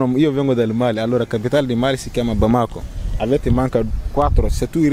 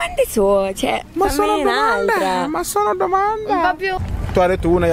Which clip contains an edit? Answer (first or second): second